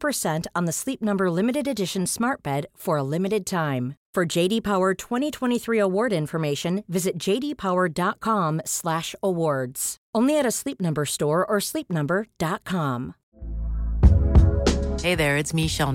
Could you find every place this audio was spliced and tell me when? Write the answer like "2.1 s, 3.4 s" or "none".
13.2 s